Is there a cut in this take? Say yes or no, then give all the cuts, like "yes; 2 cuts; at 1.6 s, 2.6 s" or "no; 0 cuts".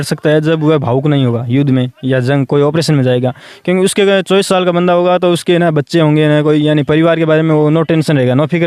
no; 0 cuts